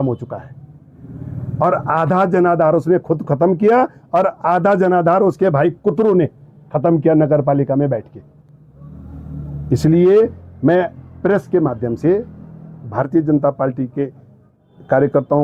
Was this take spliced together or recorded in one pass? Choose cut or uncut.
uncut